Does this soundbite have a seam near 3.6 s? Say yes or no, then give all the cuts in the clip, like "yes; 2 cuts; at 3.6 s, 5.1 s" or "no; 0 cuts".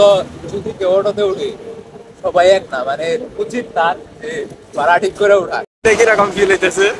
no; 1 cut; at 5.7 s